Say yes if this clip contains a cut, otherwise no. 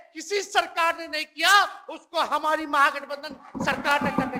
no